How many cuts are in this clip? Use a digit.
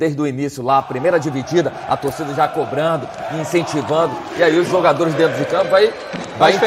0